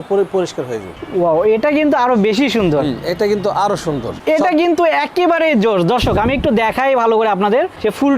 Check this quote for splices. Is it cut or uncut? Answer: cut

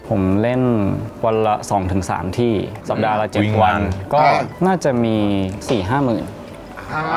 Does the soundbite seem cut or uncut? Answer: uncut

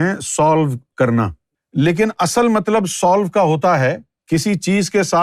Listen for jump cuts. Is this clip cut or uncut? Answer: cut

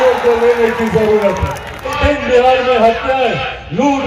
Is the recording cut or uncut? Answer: cut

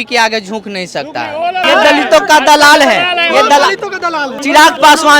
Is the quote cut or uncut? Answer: cut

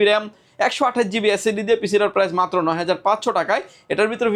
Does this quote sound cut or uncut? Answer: uncut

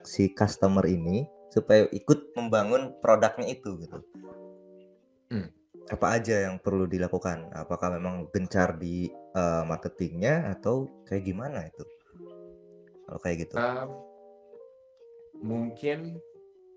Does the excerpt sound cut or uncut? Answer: uncut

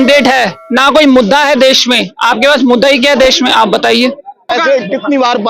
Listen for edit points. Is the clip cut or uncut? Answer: cut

